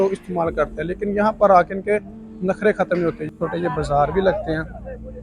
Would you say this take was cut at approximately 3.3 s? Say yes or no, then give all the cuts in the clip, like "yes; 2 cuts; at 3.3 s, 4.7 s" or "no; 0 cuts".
yes; 1 cut; at 3.3 s